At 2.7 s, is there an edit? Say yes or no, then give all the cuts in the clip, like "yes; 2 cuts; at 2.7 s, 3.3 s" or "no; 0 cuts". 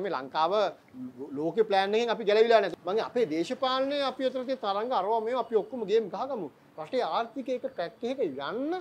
yes; 1 cut; at 2.7 s